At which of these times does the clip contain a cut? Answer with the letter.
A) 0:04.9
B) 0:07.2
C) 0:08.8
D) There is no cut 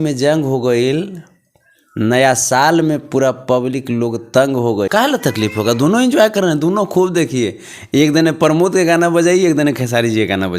A